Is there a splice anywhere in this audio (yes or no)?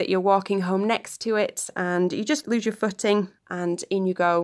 yes